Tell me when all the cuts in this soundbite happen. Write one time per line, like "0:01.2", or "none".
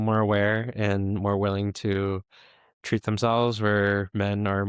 none

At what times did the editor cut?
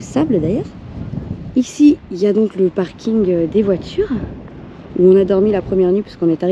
none

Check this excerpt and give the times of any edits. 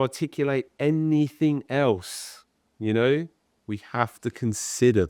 none

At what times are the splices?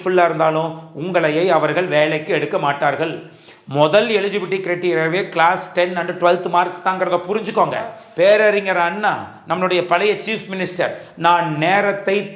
0:08.0

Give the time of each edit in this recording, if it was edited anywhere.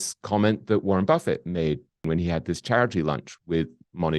0:02.1

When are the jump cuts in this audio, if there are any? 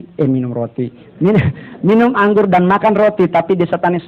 none

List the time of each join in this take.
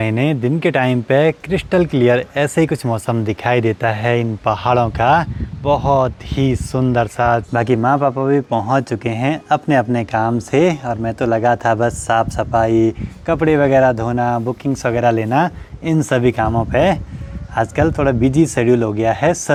none

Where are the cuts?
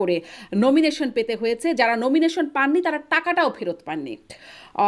none

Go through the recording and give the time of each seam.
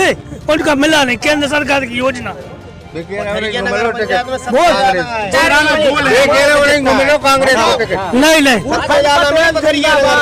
0:05.3

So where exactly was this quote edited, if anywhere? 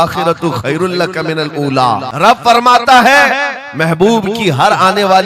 0:02.1

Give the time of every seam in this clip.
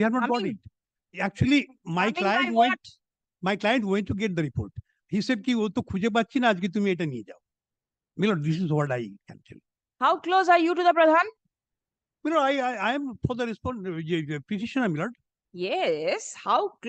none

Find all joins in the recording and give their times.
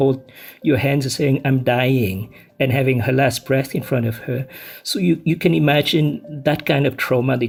none

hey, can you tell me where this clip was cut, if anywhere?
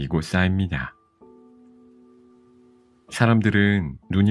0:01.1
0:03.1

